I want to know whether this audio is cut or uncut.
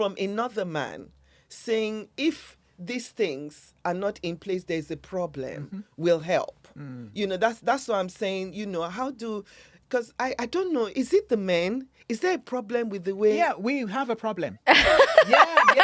uncut